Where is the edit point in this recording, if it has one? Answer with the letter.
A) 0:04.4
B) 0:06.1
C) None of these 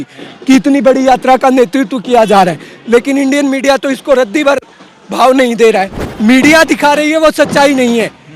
B